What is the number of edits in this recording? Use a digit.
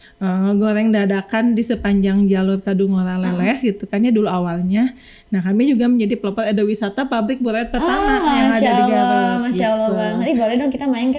0